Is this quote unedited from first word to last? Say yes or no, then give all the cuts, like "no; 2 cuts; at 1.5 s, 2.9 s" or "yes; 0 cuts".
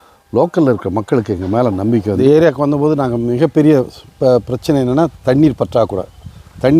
no; 1 cut; at 2.2 s